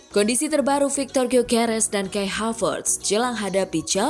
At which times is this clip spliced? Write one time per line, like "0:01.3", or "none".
none